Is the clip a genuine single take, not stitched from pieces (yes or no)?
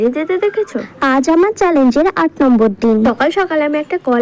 yes